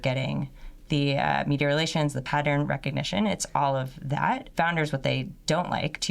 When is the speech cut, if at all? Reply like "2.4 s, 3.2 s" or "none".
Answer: 2.2 s, 4.5 s